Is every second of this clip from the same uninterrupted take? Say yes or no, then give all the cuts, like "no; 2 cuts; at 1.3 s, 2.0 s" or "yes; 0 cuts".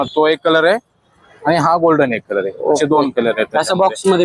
yes; 0 cuts